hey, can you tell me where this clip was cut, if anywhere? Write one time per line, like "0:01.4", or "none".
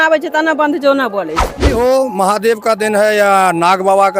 0:01.7